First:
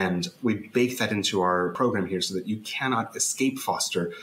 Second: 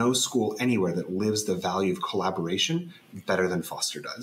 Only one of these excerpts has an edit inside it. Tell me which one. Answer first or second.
first